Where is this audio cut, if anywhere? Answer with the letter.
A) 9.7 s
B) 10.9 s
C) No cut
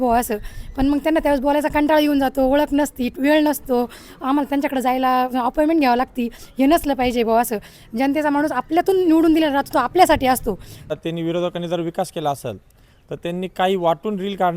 B